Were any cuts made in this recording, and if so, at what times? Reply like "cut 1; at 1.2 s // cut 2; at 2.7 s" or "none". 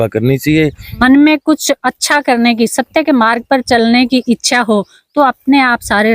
cut 1; at 1.0 s